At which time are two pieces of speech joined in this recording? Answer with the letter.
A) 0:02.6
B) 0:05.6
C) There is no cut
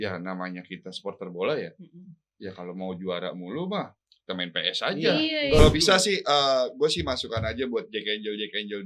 B